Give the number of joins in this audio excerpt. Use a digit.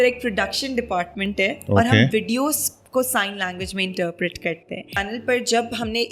1